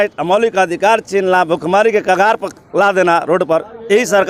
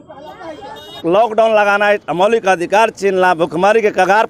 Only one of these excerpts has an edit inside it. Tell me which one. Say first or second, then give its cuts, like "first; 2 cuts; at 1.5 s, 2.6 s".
second; 1 cut; at 1.0 s